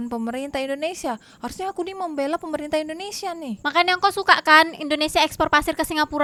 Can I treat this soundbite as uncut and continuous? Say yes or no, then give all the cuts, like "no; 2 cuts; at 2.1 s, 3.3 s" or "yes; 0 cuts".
yes; 0 cuts